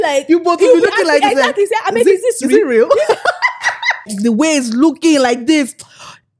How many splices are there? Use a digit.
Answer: 1